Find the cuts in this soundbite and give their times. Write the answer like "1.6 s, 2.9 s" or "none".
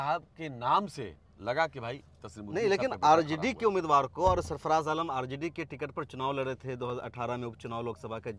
none

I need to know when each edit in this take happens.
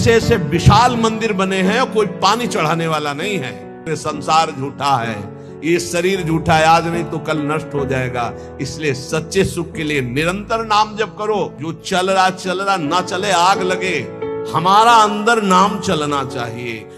3.8 s, 11.7 s

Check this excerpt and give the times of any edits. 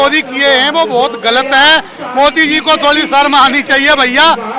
none

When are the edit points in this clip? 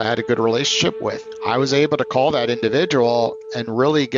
none

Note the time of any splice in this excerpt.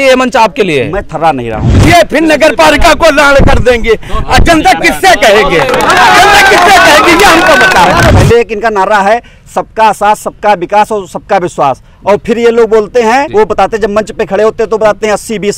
1.7 s, 8.2 s, 13.3 s

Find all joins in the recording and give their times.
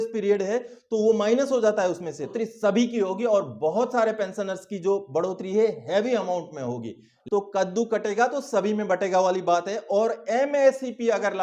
2.3 s, 7.1 s

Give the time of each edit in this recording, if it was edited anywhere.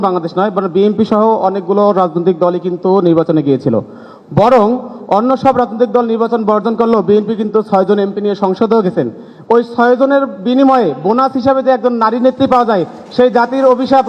none

